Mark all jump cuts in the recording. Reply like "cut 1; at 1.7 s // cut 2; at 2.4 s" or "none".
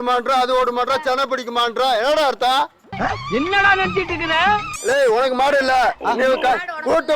cut 1; at 4.8 s